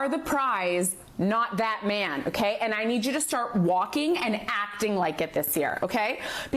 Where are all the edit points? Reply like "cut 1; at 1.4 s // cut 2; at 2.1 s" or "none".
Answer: cut 1; at 2.3 s